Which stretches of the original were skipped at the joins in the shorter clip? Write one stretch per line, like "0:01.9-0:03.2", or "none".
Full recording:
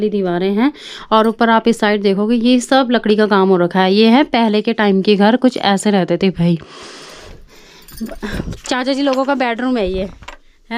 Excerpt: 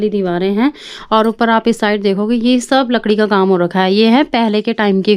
none